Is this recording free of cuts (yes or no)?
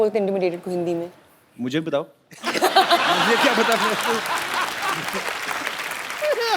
yes